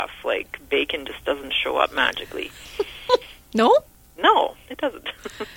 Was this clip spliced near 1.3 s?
no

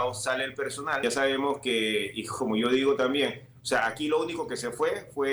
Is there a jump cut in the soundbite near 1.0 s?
yes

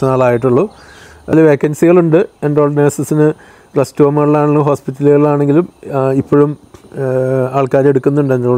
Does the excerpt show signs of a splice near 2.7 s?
no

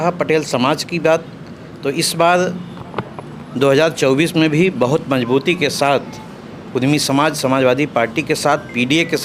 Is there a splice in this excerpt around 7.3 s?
no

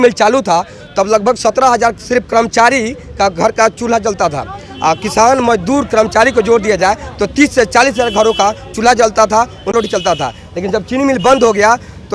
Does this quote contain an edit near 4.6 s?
no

